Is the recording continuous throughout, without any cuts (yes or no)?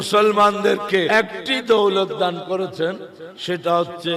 no